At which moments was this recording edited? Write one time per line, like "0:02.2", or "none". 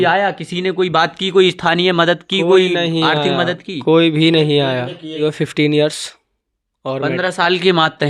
0:05.2